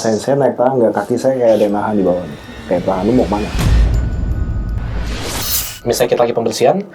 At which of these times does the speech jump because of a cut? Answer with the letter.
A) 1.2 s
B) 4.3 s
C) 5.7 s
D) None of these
C